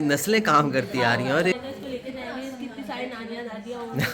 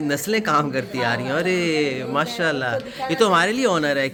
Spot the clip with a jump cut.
first; 1 cut; at 1.5 s

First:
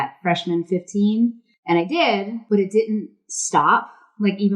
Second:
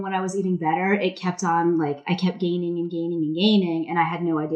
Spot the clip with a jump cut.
first; 2 cuts; at 1.5 s, 2.4 s

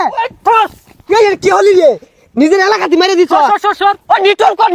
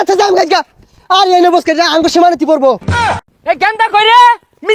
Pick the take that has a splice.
second; 1 cut; at 3.2 s

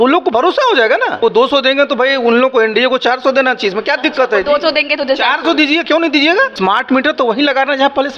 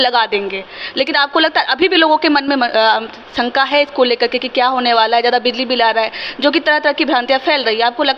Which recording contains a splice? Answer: first; 2 cuts; at 1.2 s, 6.5 s

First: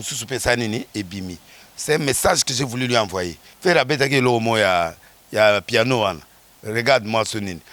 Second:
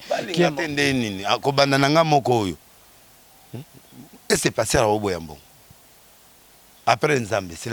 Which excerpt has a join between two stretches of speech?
first; 1 cut; at 3.4 s

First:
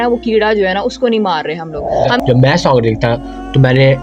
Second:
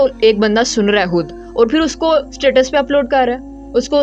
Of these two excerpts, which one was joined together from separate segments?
first; 1 cut; at 2.2 s

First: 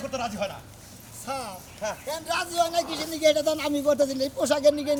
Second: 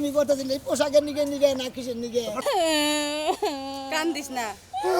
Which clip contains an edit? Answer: second; 1 cut; at 2.4 s

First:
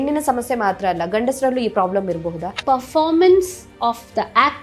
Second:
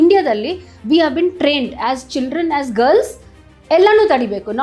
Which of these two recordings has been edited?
first; 1 cut; at 2.6 s

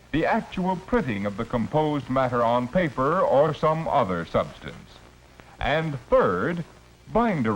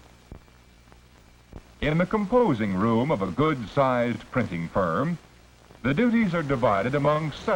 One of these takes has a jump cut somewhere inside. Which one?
first; 1 cut; at 2.1 s

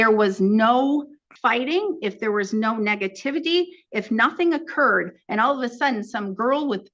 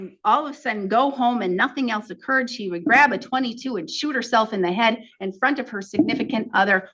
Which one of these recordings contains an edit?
first; 1 cut; at 1.2 s

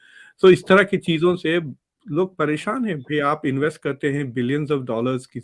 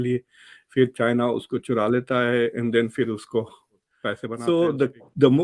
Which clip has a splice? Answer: second; 1 cut; at 4.3 s

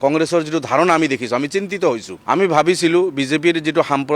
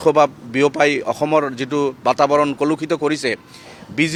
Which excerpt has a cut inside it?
first; 1 cut; at 2.1 s

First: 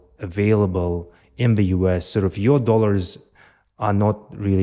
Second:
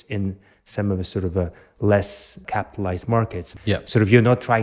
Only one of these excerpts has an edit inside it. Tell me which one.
second; 2 cuts; at 2.4 s, 3.5 s

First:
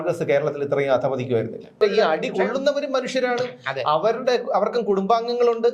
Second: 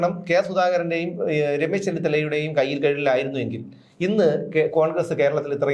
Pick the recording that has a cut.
first; 1 cut; at 1.8 s

